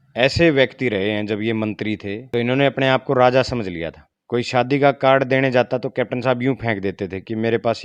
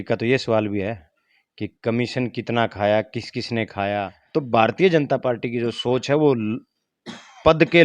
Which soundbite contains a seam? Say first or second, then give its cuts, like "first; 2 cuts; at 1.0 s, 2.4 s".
second; 1 cut; at 4.2 s